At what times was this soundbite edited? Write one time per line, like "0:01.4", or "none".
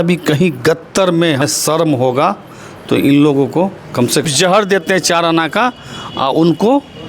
0:01.4
0:04.2